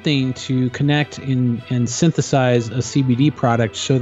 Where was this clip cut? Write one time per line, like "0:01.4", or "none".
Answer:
none